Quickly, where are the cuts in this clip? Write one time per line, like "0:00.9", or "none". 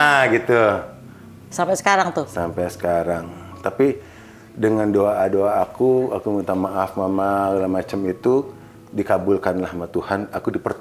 none